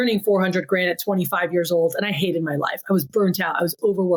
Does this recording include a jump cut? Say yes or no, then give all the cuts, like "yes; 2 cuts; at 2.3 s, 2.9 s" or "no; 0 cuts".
no; 0 cuts